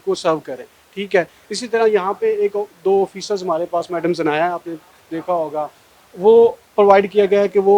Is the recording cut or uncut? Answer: uncut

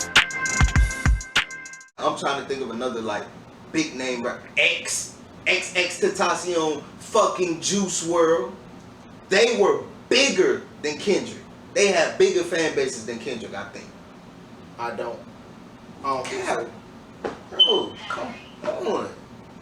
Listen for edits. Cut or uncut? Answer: cut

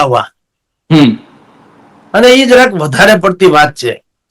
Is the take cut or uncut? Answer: uncut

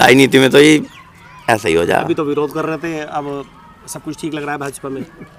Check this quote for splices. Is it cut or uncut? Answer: uncut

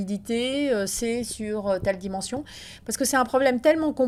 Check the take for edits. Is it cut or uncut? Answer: uncut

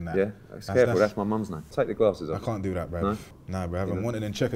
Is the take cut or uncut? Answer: cut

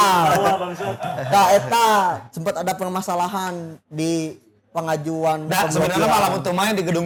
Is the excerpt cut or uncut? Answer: uncut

